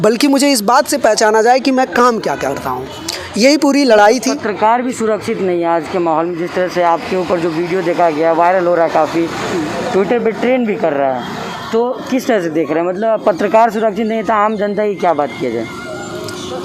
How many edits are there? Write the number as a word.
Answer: zero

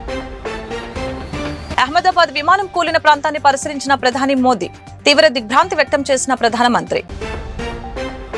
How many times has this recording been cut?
one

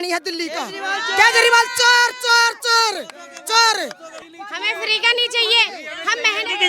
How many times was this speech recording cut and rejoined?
one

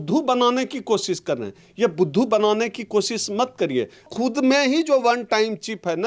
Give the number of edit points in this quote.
one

